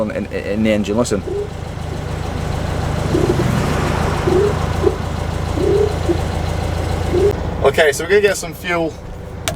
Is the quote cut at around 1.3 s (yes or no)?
no